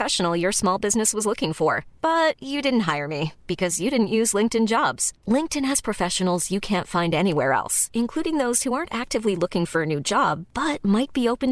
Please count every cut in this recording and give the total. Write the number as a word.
zero